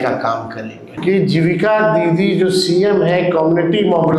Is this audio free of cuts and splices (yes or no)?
no